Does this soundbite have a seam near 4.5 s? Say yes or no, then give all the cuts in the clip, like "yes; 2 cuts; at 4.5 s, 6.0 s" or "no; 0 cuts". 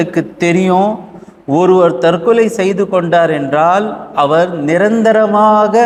no; 0 cuts